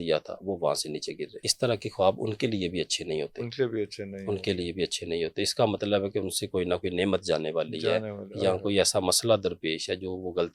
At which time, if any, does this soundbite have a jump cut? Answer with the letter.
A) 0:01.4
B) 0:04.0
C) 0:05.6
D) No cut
A